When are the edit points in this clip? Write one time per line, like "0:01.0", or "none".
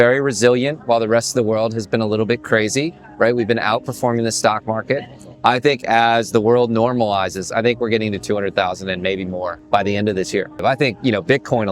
0:09.6
0:10.6